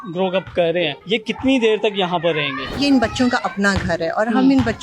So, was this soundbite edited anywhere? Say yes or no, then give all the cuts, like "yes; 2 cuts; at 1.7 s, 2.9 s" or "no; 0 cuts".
yes; 2 cuts; at 1.0 s, 2.8 s